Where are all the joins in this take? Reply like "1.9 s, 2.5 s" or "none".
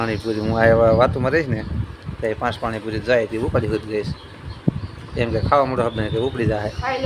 none